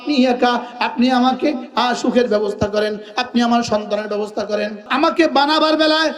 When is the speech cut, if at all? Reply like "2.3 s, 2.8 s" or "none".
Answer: 4.8 s